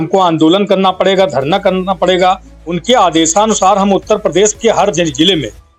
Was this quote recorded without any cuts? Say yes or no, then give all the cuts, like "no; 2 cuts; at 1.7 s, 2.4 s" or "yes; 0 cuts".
yes; 0 cuts